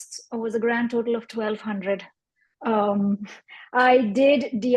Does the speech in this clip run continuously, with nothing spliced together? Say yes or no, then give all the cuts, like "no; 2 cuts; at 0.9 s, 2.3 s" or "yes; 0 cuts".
yes; 0 cuts